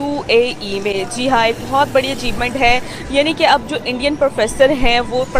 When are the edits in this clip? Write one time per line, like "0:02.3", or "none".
none